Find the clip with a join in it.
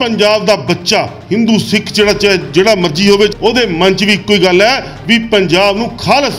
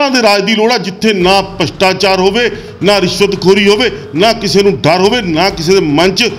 first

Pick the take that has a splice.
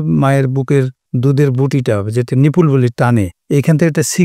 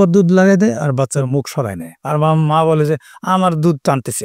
first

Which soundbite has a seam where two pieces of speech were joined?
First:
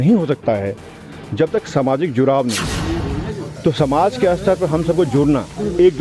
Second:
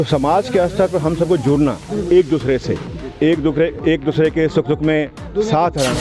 first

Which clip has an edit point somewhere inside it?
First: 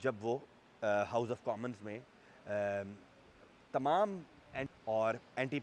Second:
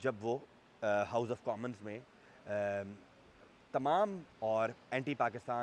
second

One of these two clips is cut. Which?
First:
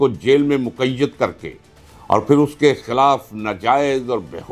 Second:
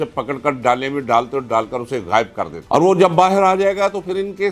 second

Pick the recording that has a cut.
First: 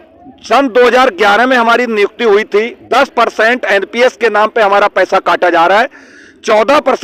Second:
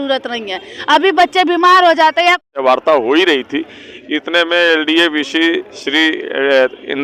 second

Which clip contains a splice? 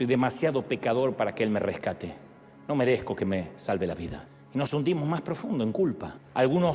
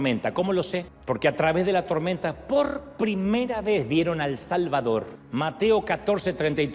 second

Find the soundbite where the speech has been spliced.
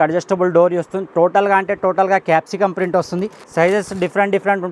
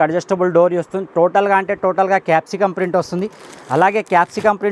first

